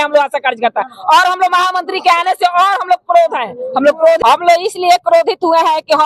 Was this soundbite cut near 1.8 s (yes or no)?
no